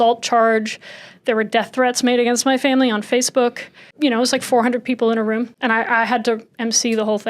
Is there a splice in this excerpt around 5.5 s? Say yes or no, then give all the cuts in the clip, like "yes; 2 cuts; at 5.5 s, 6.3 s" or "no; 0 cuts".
yes; 2 cuts; at 3.9 s, 5.5 s